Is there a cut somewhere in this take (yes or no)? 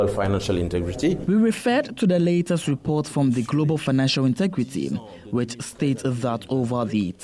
no